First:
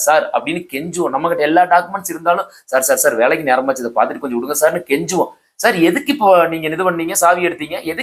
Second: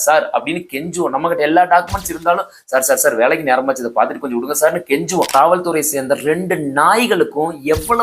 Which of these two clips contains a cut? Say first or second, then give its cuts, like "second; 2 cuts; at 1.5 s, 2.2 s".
second; 1 cut; at 5.3 s